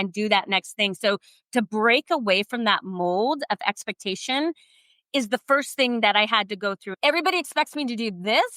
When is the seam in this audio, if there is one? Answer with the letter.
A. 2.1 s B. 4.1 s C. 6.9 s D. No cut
C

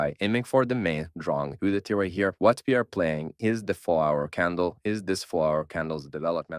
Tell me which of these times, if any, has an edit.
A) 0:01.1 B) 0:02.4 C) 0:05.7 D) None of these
D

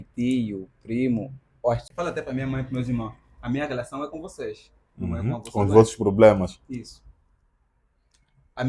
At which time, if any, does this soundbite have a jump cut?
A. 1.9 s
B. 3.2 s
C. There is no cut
A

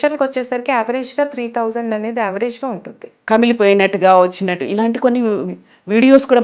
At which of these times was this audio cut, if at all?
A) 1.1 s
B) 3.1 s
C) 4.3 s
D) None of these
B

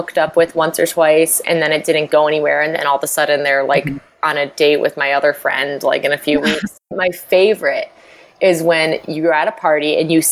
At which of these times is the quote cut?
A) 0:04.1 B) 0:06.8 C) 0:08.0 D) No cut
B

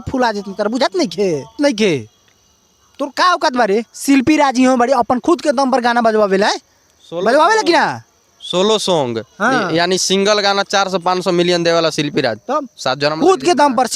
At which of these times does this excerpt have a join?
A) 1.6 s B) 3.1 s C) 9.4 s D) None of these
A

